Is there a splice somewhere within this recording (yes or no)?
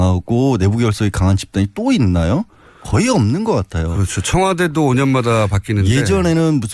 no